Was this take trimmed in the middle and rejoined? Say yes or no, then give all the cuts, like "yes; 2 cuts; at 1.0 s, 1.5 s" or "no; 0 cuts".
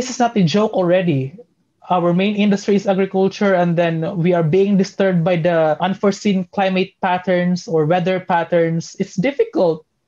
yes; 2 cuts; at 1.8 s, 5.8 s